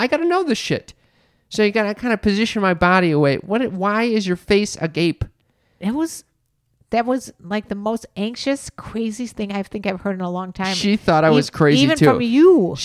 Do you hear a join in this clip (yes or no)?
no